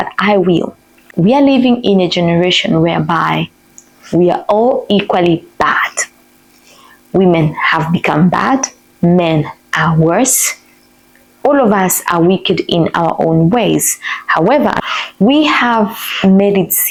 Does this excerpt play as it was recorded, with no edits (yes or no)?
yes